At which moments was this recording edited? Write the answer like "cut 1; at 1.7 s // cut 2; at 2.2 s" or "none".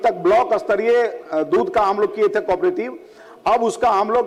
none